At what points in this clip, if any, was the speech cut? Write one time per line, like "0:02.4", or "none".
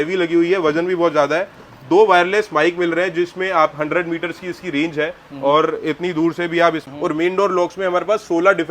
0:06.8